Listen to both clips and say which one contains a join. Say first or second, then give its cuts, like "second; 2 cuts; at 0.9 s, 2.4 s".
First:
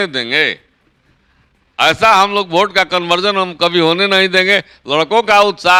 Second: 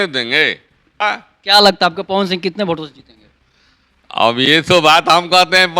second; 1 cut; at 0.9 s